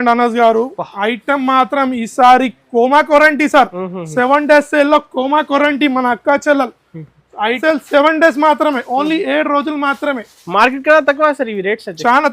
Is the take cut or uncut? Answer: cut